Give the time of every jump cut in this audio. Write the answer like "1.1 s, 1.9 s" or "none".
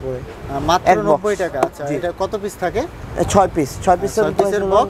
none